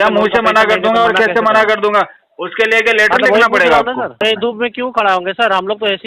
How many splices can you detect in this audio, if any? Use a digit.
1